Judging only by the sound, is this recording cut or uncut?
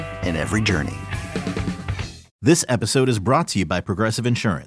cut